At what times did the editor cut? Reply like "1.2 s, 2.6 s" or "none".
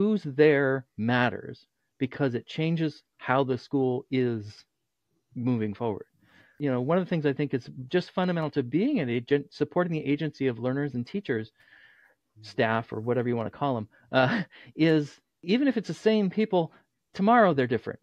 6.5 s, 15.4 s